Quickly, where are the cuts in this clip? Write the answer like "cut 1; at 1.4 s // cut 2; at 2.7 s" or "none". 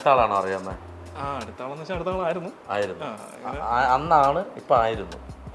none

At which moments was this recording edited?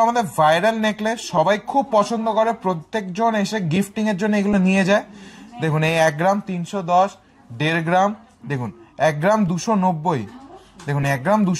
none

